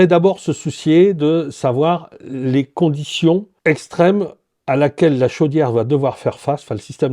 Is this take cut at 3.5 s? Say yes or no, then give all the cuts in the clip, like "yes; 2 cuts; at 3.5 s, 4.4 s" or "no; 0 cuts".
yes; 1 cut; at 3.5 s